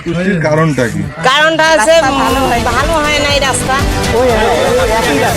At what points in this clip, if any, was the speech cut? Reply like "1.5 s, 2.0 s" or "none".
4.0 s